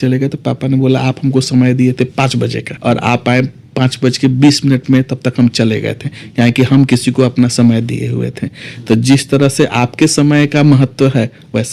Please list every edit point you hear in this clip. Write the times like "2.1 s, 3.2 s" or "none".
none